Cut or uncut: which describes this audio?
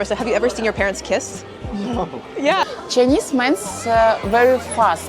cut